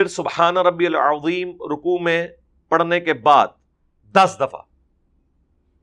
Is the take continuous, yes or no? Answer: yes